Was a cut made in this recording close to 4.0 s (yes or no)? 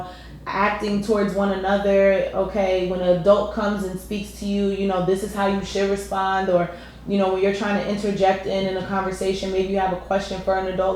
no